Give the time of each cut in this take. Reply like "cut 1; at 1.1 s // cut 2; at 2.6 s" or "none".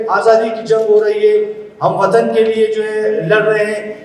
none